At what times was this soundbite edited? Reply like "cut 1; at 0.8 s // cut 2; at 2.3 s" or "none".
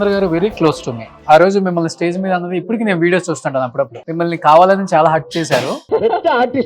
cut 1; at 1.1 s // cut 2; at 4.0 s // cut 3; at 5.8 s